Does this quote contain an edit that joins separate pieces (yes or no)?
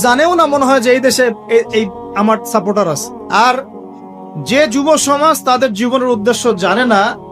yes